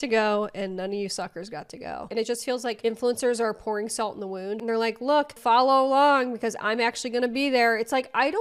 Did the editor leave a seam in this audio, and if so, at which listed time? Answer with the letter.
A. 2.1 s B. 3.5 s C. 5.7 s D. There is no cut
A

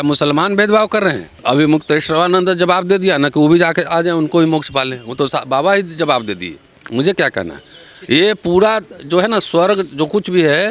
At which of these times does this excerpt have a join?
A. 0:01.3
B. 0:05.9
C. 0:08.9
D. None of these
A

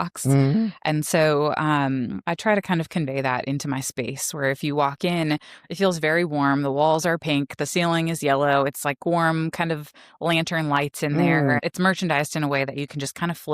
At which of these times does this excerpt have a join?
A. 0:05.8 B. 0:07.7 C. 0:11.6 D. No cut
C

